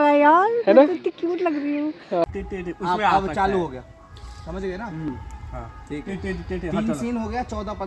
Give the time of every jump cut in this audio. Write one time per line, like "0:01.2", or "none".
0:02.2